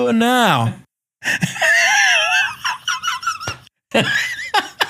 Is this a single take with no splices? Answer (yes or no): yes